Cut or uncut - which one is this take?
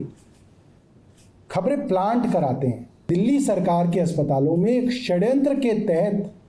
cut